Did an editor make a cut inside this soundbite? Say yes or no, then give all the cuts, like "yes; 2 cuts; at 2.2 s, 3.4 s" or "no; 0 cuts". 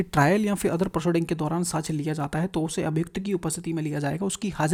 no; 0 cuts